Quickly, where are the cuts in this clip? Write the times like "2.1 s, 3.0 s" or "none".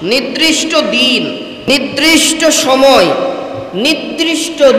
1.7 s